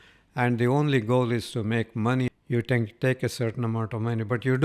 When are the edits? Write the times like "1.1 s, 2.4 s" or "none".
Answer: 2.3 s

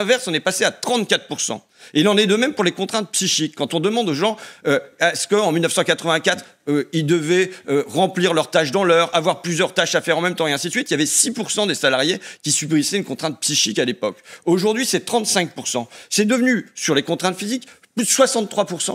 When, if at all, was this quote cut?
none

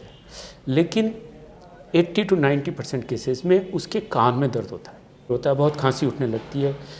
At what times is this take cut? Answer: 5.3 s

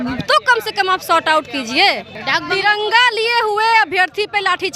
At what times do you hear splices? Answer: 2.1 s

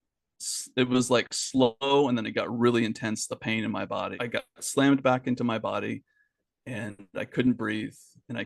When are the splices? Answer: 4.1 s

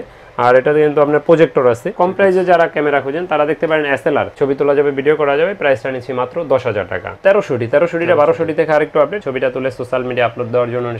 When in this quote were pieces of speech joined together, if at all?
1.9 s, 4.3 s, 7.1 s, 9.2 s

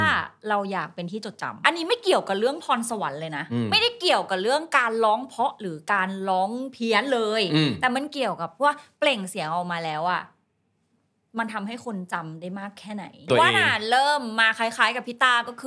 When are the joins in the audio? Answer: 1.6 s, 13.2 s

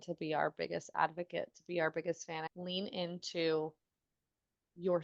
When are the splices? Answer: 2.5 s

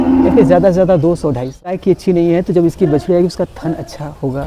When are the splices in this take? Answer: 1.8 s

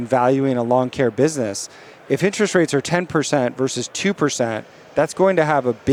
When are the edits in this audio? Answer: none

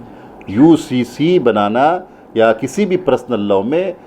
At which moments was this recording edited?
none

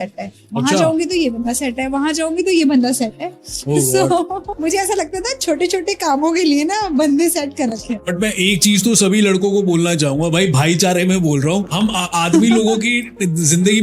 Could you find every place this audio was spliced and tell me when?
4.5 s, 8.1 s, 11.7 s

